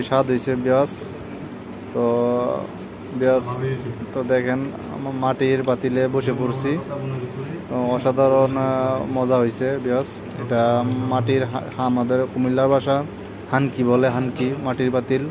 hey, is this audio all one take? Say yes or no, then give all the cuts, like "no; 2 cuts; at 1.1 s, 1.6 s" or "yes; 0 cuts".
yes; 0 cuts